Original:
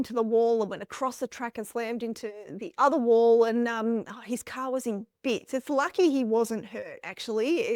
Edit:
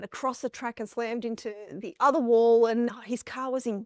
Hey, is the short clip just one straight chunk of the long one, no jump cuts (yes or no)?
no